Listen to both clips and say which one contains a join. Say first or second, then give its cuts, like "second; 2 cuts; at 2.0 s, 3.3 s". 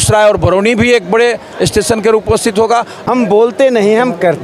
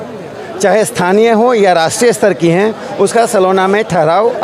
first; 1 cut; at 3.5 s